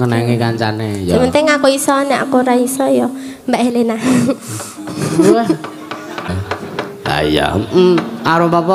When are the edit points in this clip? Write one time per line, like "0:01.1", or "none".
0:06.3